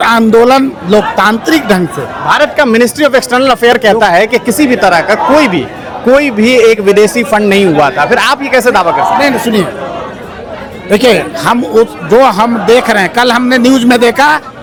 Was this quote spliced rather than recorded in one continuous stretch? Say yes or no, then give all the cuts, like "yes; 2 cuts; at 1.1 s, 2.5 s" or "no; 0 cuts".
no; 0 cuts